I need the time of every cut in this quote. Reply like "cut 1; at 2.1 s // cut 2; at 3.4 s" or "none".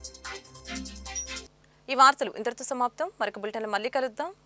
none